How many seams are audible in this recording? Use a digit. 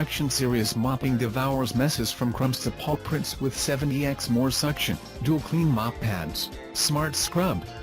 1